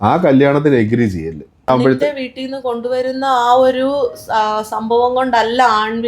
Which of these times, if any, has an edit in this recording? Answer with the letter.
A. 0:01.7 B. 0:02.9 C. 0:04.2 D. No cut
A